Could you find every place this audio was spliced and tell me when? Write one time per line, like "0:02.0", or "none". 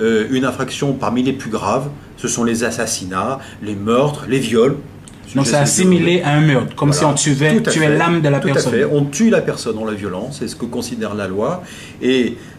none